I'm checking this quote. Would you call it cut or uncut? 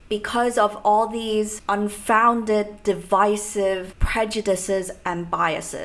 cut